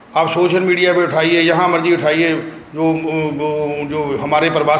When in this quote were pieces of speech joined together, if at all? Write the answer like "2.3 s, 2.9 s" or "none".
none

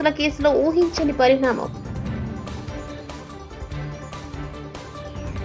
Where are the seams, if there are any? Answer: none

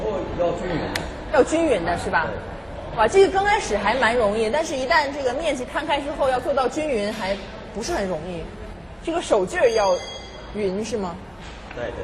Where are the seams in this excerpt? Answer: none

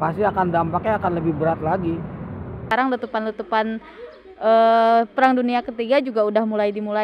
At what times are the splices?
2.6 s

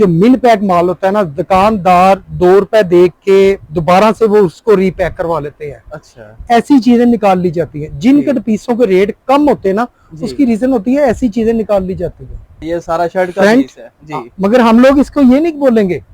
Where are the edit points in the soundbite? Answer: 12.6 s

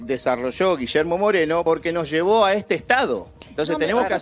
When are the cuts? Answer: 1.6 s

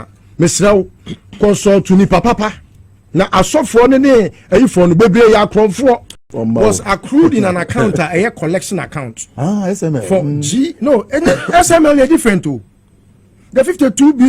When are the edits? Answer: 6.2 s

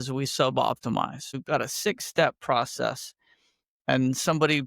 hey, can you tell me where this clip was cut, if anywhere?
1.3 s

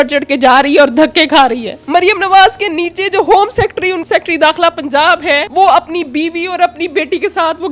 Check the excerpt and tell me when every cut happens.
1.7 s, 4.0 s, 5.5 s

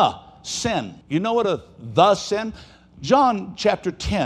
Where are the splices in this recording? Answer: 1.0 s

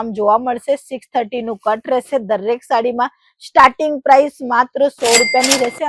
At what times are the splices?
none

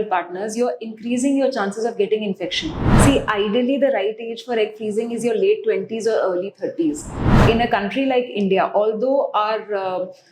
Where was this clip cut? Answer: 2.8 s, 7.3 s

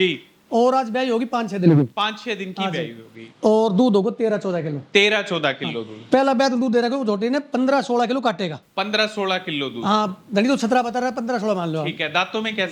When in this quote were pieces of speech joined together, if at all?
none

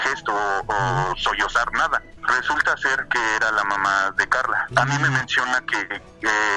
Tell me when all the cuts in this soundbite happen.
2.2 s, 4.7 s

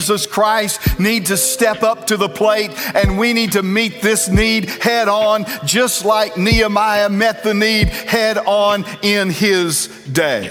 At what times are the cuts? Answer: none

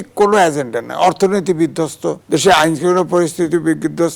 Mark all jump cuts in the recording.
2.1 s

